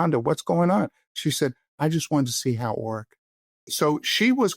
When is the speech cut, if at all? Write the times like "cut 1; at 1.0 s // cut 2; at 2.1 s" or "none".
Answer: cut 1; at 3.6 s

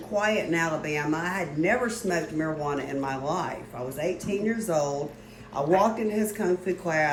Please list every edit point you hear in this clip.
none

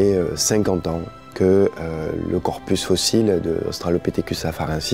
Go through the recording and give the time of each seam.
none

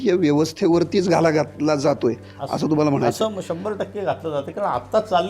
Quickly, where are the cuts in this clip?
none

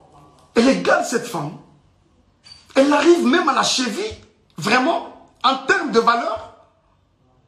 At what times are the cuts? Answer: none

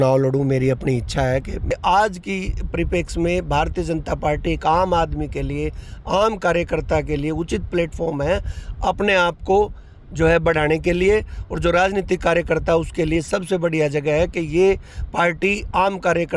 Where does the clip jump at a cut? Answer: cut 1; at 1.7 s

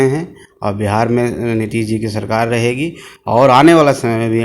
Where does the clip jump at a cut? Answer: none

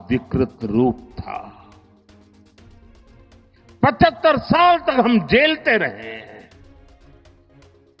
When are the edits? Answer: cut 1; at 1.6 s // cut 2; at 3.8 s // cut 3; at 6.7 s

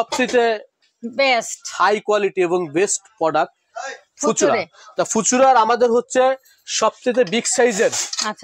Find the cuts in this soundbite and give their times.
none

